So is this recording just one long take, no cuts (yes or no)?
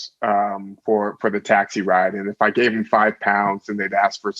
yes